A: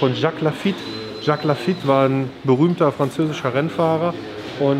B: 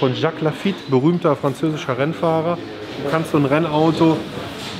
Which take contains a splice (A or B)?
B